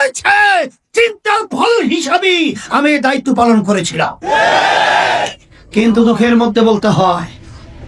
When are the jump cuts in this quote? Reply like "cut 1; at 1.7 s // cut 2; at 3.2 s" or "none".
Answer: none